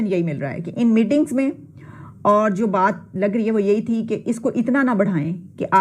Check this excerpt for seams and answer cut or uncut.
uncut